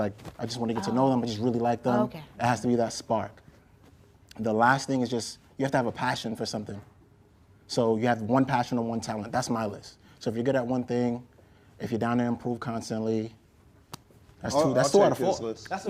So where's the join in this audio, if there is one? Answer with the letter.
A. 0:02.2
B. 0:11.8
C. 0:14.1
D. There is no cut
D